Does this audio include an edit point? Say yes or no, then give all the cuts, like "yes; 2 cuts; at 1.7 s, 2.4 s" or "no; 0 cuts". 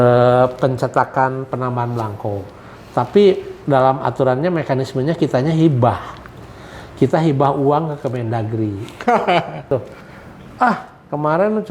yes; 1 cut; at 9.7 s